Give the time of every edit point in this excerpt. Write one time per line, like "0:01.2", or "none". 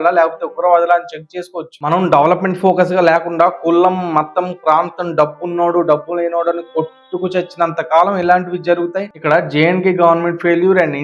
0:01.7
0:09.1